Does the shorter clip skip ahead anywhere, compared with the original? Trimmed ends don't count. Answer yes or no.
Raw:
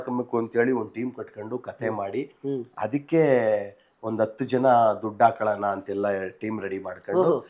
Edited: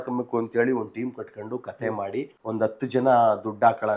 yes